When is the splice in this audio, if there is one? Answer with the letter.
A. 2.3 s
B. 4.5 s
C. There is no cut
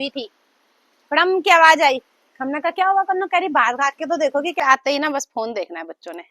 B